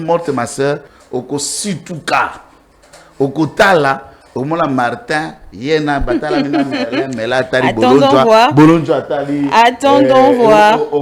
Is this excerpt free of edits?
no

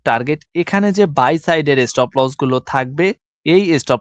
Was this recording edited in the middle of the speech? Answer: no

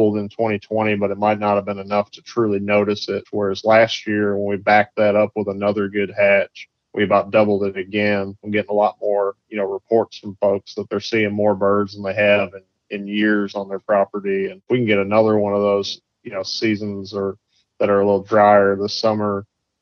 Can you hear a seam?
yes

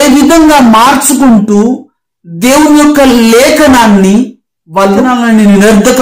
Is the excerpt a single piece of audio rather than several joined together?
no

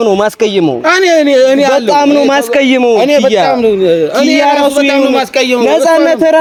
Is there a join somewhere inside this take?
no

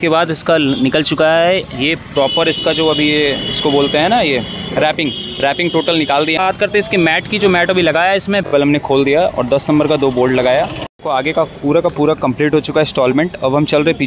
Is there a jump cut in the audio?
yes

